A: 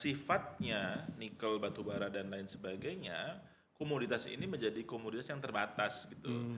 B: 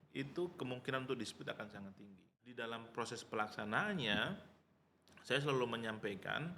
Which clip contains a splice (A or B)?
B